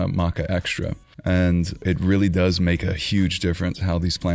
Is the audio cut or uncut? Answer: cut